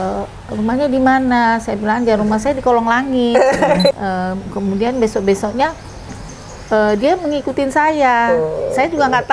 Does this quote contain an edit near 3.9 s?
yes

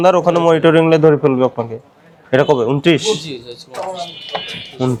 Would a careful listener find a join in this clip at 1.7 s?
no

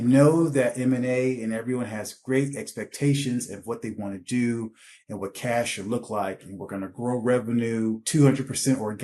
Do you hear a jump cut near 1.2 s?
no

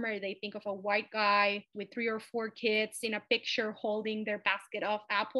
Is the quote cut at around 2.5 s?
no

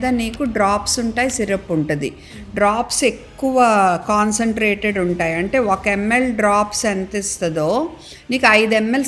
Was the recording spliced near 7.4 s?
no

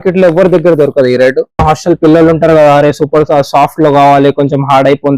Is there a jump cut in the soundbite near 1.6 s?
yes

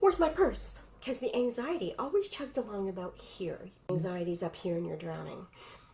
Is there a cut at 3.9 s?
yes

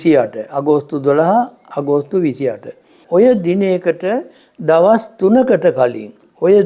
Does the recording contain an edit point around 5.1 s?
no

